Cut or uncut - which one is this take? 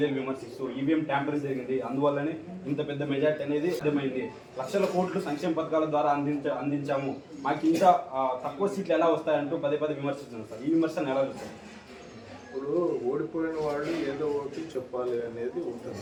uncut